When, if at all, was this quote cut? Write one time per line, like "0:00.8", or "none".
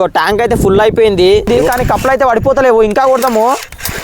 0:01.5

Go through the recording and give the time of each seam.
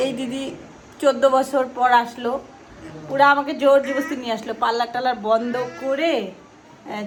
none

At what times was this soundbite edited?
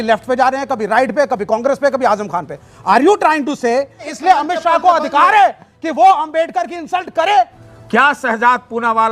0:04.0
0:07.6

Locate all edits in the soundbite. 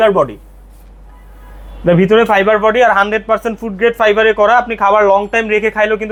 none

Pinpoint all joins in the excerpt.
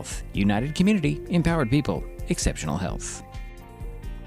0:03.0

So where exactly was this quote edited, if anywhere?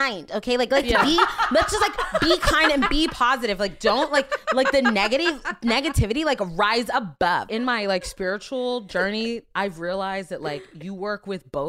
0:07.5

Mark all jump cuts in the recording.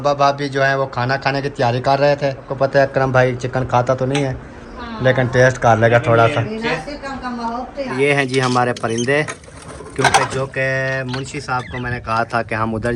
0:02.5
0:07.9

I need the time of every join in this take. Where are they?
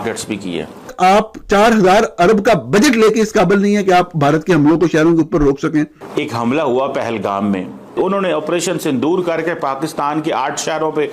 0:00.9
0:06.0

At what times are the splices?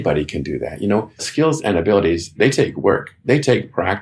0:01.3
0:02.3

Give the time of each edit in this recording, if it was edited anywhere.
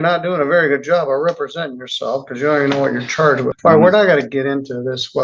0:03.5

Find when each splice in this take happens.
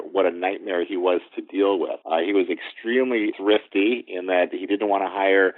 0:02.0
0:03.3

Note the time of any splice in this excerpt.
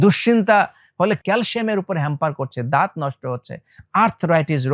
none

